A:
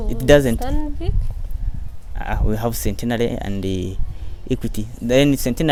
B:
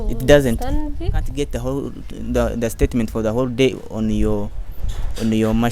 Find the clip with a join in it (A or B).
B